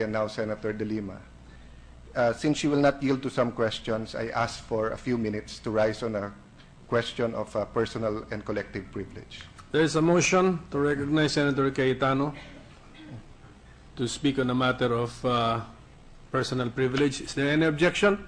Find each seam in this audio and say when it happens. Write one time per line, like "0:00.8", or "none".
0:01.3